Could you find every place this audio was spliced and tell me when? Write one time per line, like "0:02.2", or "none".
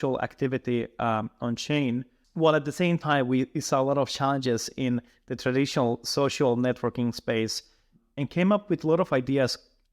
0:02.2
0:08.0